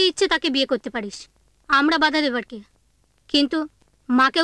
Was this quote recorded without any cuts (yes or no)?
yes